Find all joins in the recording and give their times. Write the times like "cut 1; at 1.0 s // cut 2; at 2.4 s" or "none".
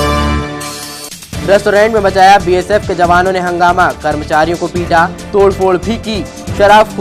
cut 1; at 0.9 s

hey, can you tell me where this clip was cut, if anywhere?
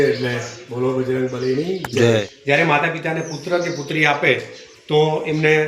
cut 1; at 2.3 s

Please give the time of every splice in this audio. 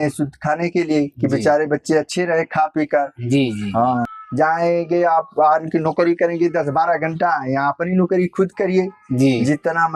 cut 1; at 4.1 s

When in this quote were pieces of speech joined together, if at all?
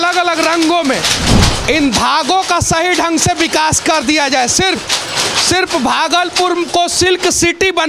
cut 1; at 1.2 s

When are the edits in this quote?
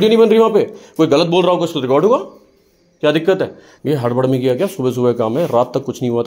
cut 1; at 3.7 s

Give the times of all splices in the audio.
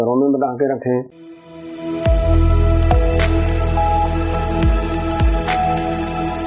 cut 1; at 1.2 s

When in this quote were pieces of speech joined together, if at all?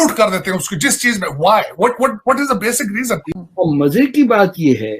cut 1; at 3.2 s

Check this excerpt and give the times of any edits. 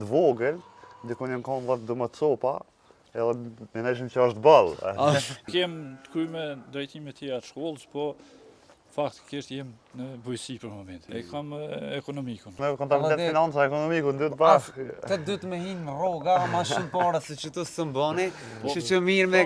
cut 1; at 5.5 s // cut 2; at 10.9 s // cut 3; at 12.6 s

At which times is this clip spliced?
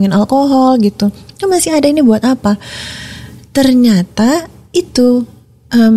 none

